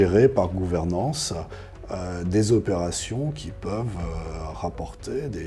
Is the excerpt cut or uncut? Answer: uncut